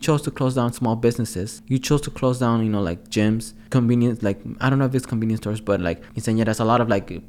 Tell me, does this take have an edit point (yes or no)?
yes